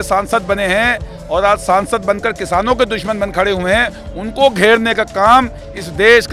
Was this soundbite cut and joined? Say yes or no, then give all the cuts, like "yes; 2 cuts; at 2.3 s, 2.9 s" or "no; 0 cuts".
no; 0 cuts